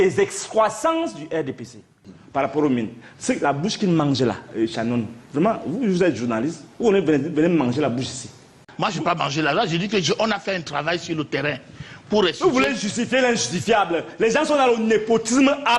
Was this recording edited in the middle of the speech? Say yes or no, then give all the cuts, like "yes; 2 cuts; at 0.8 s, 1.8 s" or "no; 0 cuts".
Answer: yes; 2 cuts; at 2.2 s, 8.7 s